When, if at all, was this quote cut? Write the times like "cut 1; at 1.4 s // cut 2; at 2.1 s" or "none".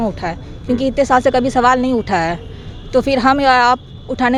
none